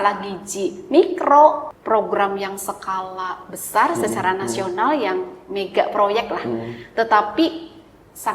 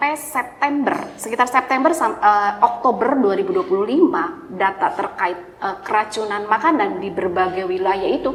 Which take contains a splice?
first; 1 cut; at 1.7 s

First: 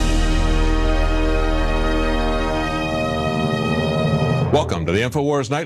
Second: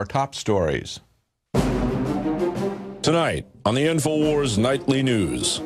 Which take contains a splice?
first; 1 cut; at 4.7 s

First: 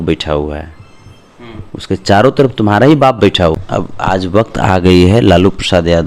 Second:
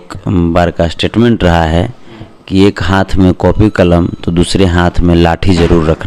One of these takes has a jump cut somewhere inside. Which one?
first; 1 cut; at 3.6 s

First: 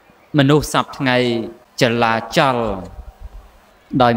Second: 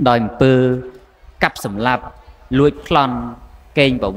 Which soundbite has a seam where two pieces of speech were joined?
first; 1 cut; at 1.6 s

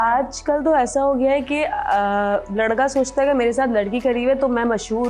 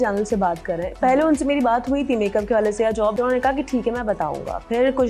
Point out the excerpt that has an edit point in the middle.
second; 1 cut; at 3.1 s

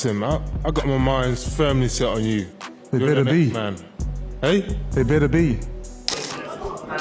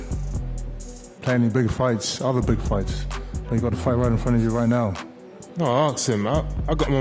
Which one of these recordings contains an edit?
first; 1 cut; at 6.1 s

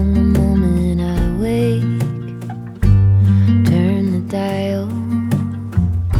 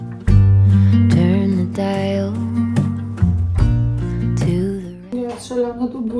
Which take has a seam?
second; 1 cut; at 5.1 s

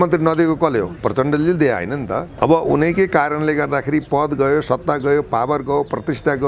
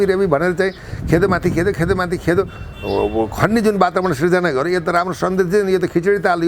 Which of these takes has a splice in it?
first; 1 cut; at 2.3 s

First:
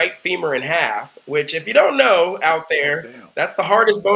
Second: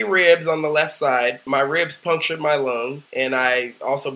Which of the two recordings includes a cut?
second; 2 cuts; at 1.4 s, 3.0 s

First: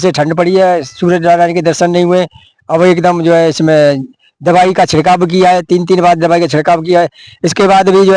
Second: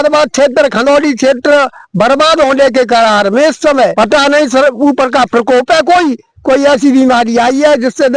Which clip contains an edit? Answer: second; 1 cut; at 3.9 s

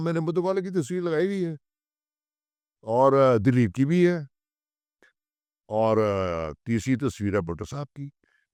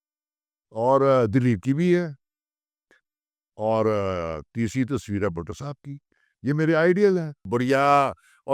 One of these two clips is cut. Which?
second; 1 cut; at 7.5 s

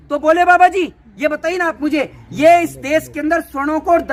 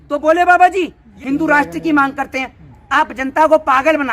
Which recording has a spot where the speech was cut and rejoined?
second; 1 cut; at 1.1 s

